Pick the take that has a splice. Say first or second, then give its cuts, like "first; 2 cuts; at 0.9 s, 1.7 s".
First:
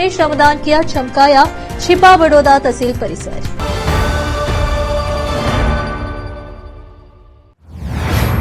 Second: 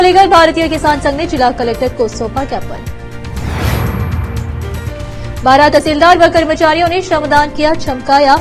first; 1 cut; at 7.4 s